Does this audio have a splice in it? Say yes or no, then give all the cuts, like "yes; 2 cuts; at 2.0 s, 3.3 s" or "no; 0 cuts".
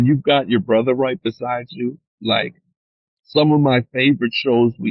no; 0 cuts